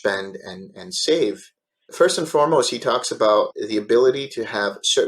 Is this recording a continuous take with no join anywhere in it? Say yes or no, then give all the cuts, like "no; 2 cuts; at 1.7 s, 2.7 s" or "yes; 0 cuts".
no; 2 cuts; at 1.9 s, 3.5 s